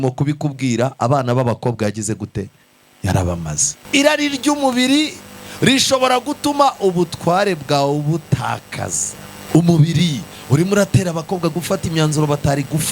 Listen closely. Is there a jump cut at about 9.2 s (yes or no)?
no